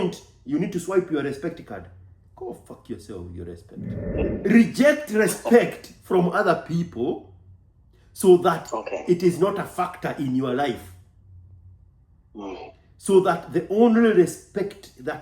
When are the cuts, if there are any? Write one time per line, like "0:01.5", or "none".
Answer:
0:04.1